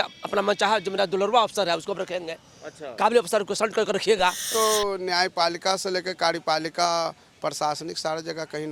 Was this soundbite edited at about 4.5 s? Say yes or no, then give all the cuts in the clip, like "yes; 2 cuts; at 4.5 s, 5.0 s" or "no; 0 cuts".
yes; 1 cut; at 4.5 s